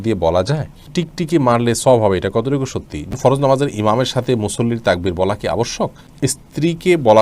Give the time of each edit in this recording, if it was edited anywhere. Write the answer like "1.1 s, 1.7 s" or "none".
1.0 s, 3.1 s, 6.0 s